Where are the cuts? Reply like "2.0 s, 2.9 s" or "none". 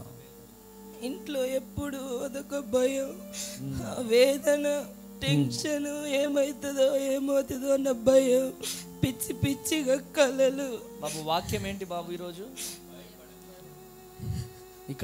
none